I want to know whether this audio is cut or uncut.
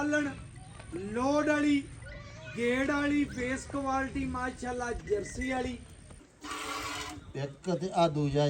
cut